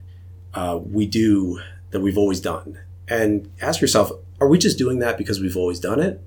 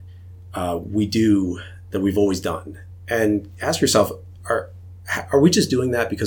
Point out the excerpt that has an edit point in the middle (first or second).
first